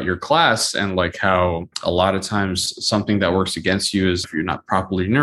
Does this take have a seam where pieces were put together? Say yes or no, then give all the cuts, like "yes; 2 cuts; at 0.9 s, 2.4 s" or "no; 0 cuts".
yes; 2 cuts; at 1.7 s, 4.2 s